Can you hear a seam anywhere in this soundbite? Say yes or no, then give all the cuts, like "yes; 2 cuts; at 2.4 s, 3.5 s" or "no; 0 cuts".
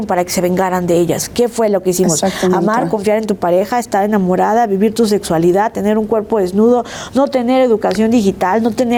no; 0 cuts